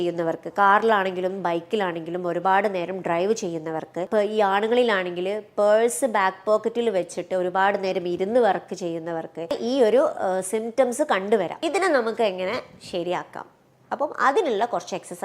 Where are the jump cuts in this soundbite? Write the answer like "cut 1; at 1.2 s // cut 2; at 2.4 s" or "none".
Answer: cut 1; at 4.1 s // cut 2; at 9.6 s // cut 3; at 11.5 s